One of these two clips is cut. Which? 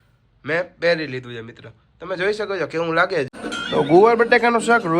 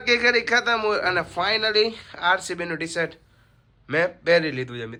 first; 1 cut; at 3.3 s

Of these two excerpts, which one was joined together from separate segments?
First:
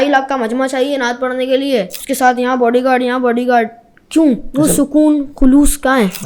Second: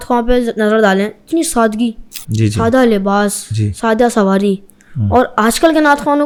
first; 2 cuts; at 2.0 s, 4.5 s

